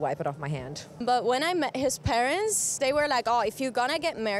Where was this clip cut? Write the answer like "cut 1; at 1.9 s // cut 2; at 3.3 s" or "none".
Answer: cut 1; at 1.0 s

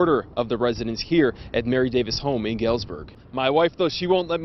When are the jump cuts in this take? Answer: cut 1; at 3.2 s

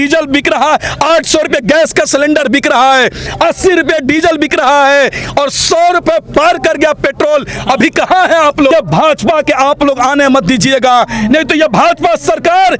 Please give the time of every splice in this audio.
cut 1; at 8.7 s

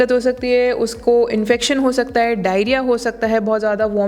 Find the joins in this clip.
none

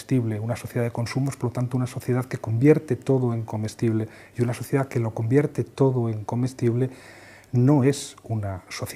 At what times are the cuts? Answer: cut 1; at 3.5 s

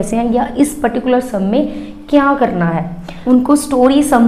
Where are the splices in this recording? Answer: cut 1; at 3.1 s

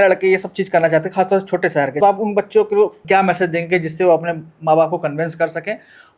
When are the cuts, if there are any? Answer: cut 1; at 2.0 s // cut 2; at 3.0 s

